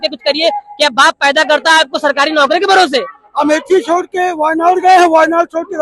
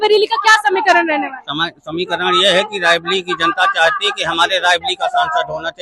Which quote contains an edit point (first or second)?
first